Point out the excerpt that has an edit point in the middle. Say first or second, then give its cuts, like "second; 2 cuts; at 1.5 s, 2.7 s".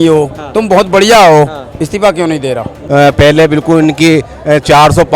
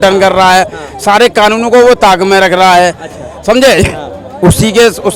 first; 1 cut; at 2.7 s